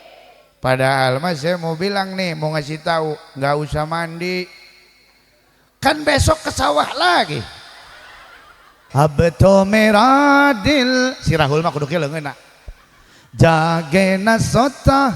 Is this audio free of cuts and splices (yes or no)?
no